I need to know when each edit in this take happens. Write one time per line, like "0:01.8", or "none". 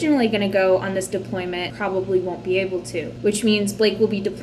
0:01.7